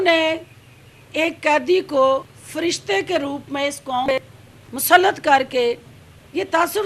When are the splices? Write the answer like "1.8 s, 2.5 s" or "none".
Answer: 2.4 s, 4.1 s